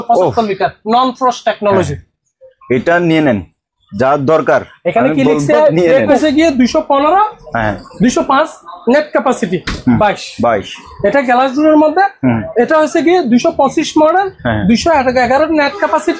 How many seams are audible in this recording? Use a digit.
1